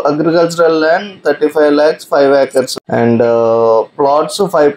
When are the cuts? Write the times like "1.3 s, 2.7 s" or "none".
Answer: 2.7 s